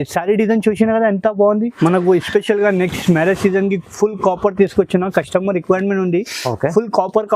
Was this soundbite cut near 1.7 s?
yes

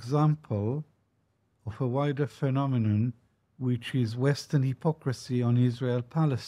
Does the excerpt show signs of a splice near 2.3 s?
no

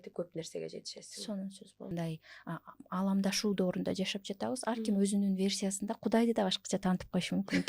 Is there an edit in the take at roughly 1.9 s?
yes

